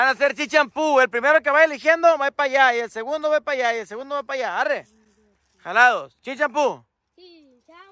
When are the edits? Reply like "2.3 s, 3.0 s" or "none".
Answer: none